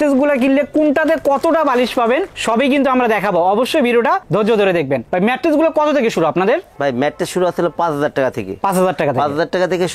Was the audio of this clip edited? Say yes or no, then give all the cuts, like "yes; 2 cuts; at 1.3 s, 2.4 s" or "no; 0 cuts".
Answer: no; 0 cuts